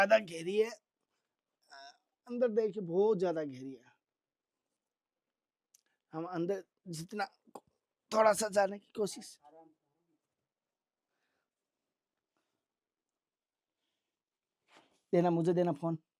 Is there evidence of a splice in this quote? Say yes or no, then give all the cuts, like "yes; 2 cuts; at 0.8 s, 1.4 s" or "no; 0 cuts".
no; 0 cuts